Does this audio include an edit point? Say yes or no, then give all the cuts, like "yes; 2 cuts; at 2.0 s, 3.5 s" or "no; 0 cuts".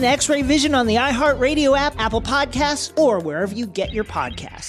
no; 0 cuts